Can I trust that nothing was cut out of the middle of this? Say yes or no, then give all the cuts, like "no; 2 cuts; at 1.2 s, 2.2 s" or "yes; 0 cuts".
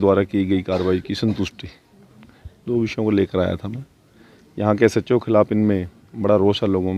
yes; 0 cuts